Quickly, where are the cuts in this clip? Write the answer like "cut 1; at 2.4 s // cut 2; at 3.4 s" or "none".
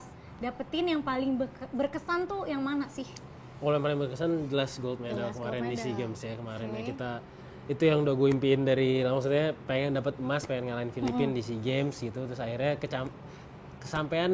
none